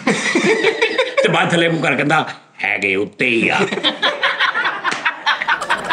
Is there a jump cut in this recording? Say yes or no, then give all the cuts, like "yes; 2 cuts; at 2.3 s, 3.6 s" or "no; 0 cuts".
no; 0 cuts